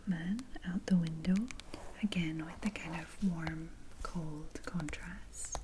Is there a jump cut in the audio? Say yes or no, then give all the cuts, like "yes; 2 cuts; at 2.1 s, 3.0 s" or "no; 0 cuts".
yes; 1 cut; at 1.7 s